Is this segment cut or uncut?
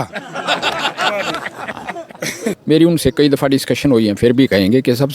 cut